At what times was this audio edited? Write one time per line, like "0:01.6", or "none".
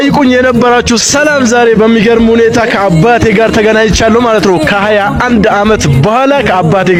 none

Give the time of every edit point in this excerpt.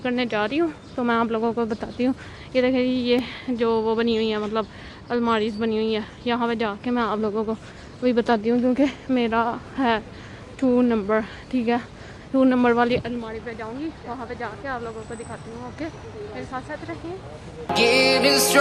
none

